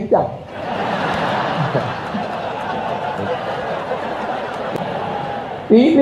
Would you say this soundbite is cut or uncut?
cut